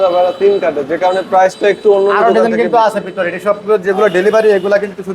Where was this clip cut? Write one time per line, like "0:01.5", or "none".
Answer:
none